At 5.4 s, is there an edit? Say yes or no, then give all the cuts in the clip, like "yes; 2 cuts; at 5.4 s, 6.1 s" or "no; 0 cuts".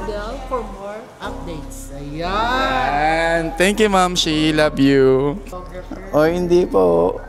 yes; 1 cut; at 5.4 s